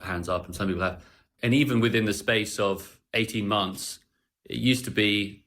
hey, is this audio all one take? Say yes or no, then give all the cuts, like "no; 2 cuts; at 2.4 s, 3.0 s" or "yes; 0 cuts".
no; 1 cut; at 1.3 s